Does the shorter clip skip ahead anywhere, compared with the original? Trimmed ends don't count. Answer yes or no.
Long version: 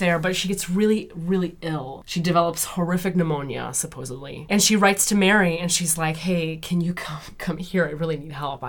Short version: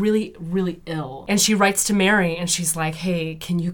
yes